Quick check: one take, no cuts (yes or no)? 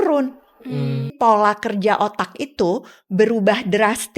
no